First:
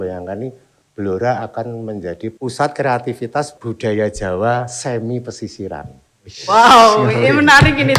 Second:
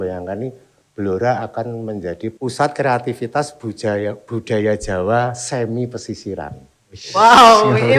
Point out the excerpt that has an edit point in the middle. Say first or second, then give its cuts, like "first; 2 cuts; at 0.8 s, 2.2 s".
first; 1 cut; at 3.6 s